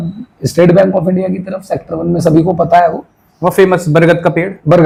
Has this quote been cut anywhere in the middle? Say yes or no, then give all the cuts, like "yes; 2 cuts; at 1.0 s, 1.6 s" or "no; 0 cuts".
no; 0 cuts